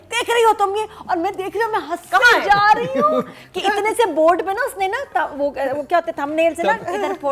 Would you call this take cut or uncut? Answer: uncut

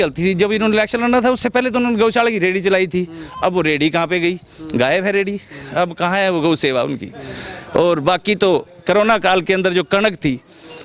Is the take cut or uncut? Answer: uncut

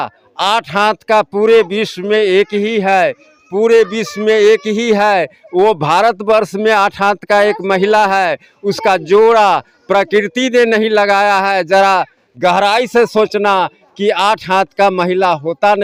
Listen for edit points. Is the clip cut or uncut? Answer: uncut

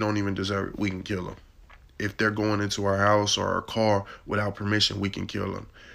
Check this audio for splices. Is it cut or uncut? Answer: uncut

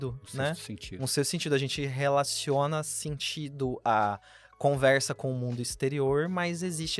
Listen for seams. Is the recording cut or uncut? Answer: uncut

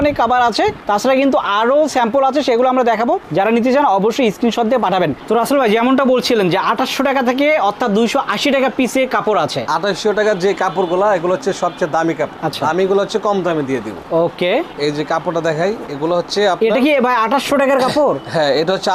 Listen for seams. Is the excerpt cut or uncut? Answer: uncut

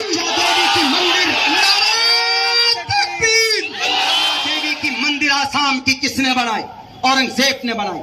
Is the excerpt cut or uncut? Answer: cut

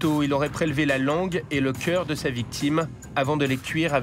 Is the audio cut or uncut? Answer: uncut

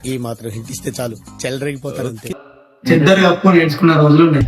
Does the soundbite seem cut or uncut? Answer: cut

